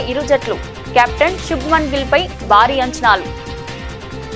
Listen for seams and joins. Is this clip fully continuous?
yes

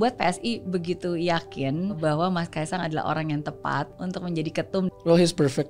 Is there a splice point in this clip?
yes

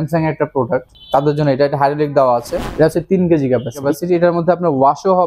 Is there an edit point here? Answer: yes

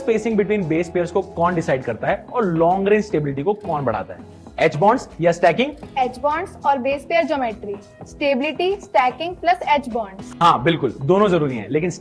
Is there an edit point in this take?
no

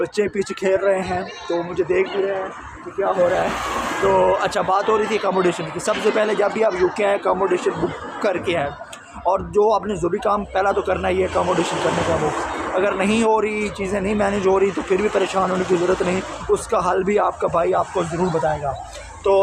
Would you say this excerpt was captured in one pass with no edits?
yes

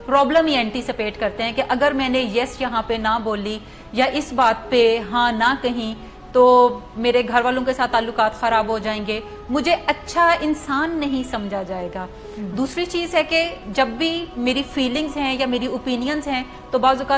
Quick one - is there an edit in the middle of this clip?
no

